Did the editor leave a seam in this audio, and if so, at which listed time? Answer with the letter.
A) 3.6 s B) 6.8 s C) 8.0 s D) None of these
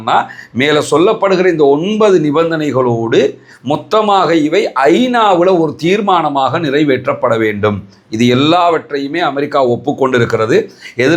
D